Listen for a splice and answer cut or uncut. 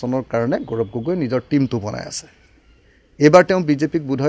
uncut